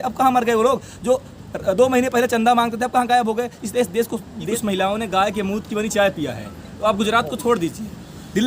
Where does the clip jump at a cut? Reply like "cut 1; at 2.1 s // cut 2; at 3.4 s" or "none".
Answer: cut 1; at 4.5 s